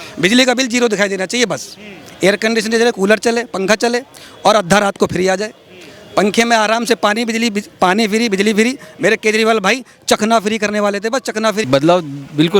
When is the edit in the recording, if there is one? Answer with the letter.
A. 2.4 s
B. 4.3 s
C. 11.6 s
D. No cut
C